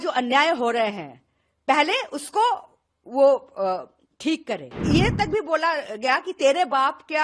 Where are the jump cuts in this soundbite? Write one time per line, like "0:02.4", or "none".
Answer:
0:04.7